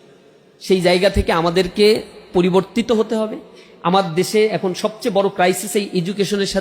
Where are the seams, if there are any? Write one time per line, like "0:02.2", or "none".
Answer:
0:05.6